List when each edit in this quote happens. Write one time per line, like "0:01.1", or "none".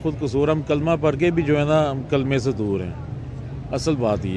none